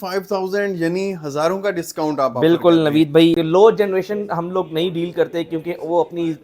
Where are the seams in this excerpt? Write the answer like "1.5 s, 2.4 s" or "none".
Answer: 3.4 s